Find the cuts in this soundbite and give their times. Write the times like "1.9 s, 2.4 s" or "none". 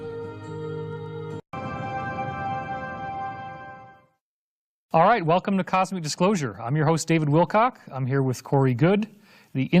none